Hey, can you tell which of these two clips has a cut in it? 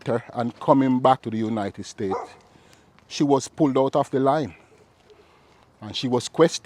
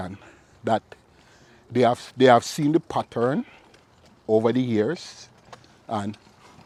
first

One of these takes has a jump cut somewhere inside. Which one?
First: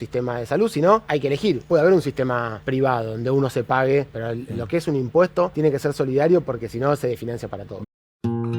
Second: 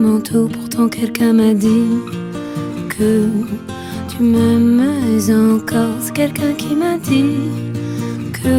first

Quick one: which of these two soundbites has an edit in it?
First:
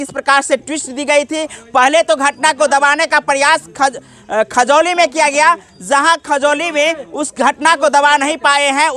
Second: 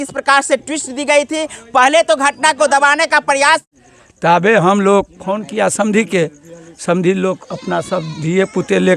second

